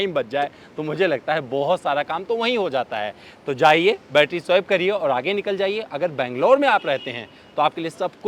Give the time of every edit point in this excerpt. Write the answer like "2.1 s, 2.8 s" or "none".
none